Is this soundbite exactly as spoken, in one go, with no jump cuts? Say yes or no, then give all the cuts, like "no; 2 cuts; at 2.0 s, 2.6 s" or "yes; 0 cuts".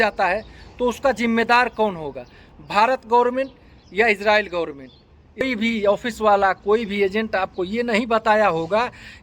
no; 1 cut; at 5.4 s